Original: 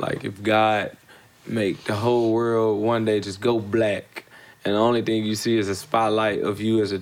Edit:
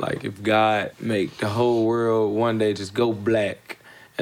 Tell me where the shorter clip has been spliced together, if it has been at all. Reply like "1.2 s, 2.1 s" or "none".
0.9 s